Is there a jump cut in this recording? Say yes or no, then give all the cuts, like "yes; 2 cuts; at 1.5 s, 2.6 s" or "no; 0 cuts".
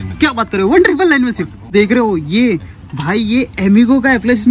no; 0 cuts